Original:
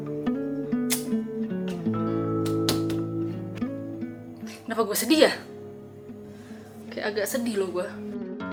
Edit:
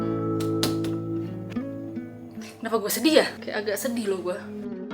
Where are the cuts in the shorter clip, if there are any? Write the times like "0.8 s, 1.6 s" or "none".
3.4 s